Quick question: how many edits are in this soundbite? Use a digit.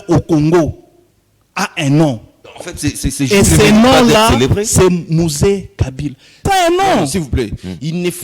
1